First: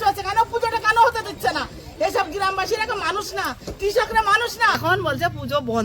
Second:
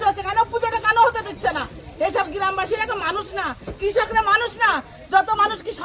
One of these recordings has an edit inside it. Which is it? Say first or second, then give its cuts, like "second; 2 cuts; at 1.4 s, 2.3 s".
first; 1 cut; at 4.8 s